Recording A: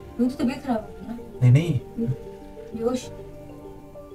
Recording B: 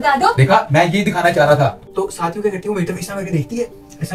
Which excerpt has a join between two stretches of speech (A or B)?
B